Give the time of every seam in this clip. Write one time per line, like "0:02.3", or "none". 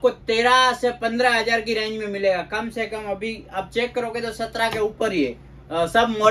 none